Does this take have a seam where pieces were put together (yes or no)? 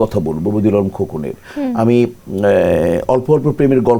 no